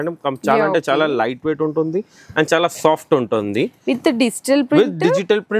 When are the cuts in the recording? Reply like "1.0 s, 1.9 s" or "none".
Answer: none